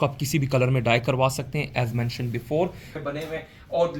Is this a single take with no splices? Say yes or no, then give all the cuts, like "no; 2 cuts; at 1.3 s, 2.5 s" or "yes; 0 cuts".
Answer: no; 1 cut; at 2.9 s